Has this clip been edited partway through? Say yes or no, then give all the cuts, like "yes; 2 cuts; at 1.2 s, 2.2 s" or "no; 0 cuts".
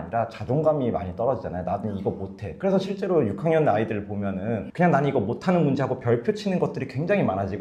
no; 0 cuts